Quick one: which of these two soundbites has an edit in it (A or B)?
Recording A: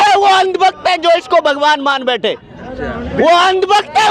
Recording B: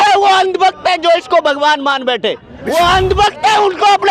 B